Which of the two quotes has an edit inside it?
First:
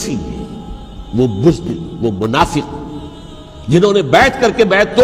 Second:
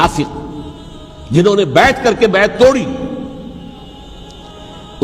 second; 1 cut; at 3.9 s

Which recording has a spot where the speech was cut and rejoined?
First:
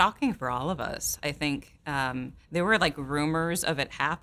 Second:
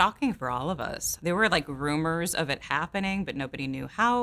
second; 1 cut; at 1.1 s

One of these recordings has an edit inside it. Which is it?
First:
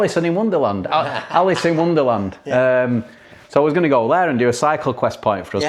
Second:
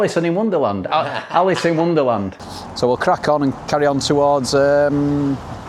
second; 1 cut; at 2.3 s

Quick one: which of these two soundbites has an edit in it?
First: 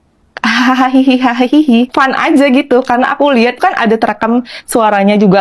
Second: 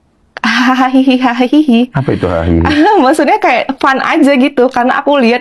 first; 2 cuts; at 1.9 s, 3.6 s

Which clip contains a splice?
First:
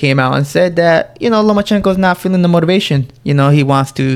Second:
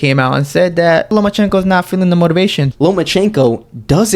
second; 2 cuts; at 1.1 s, 2.7 s

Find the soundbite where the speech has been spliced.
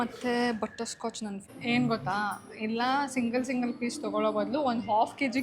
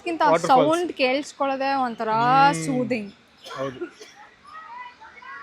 first; 1 cut; at 1.5 s

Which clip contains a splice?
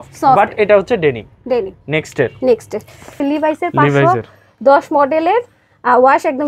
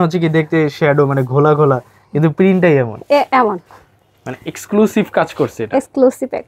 first; 1 cut; at 3.2 s

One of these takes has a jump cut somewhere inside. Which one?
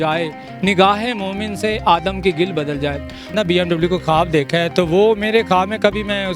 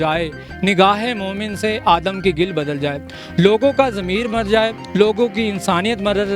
first; 1 cut; at 3.3 s

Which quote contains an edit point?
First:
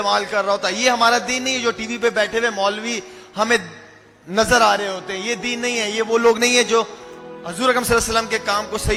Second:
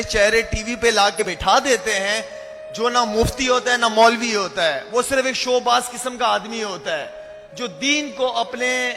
second; 1 cut; at 1.2 s

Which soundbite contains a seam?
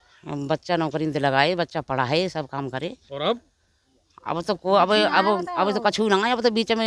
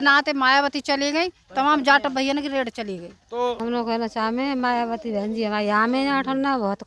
second; 1 cut; at 3.6 s

